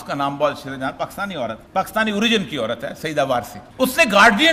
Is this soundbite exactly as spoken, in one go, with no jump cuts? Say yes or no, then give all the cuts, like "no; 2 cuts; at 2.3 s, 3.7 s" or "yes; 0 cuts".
no; 2 cuts; at 1.6 s, 3.6 s